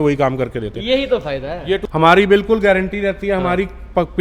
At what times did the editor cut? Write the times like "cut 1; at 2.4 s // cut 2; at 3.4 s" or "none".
cut 1; at 1.8 s